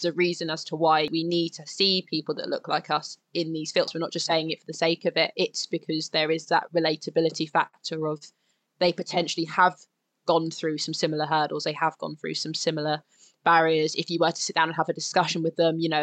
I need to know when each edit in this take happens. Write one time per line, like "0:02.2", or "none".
0:01.1
0:03.9